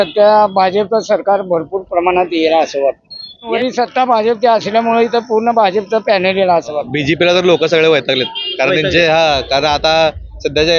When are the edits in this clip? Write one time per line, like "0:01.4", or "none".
0:03.5
0:06.9